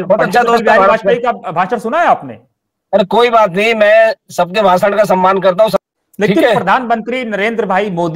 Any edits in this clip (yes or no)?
yes